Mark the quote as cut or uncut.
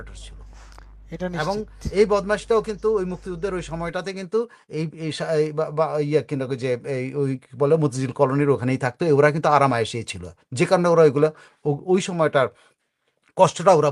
uncut